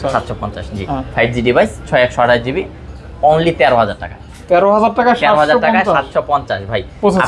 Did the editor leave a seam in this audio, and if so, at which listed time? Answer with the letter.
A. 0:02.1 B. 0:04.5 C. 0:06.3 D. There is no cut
D